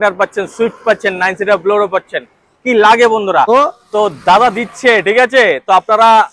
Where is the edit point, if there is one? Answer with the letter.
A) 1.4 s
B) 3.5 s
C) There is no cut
B